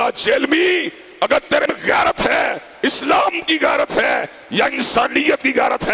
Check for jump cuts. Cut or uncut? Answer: cut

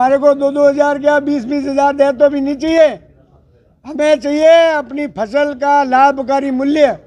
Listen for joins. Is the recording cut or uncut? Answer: uncut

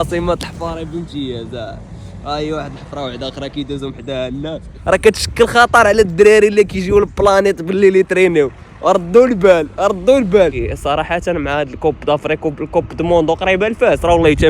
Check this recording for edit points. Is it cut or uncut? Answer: cut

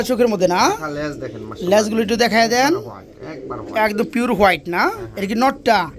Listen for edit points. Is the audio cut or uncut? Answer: uncut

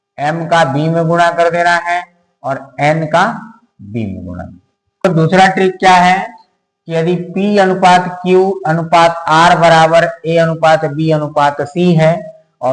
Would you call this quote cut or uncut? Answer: cut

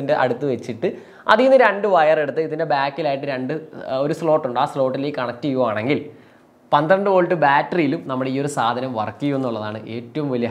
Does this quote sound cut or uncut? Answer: uncut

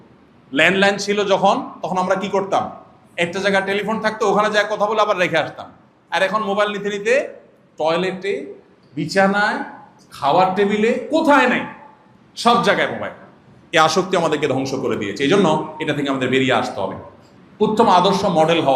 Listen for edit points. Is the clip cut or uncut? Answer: uncut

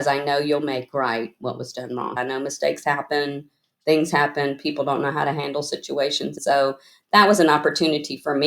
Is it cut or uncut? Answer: cut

